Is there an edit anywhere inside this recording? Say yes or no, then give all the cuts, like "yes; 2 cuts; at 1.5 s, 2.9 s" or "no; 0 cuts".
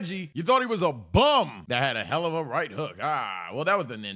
no; 0 cuts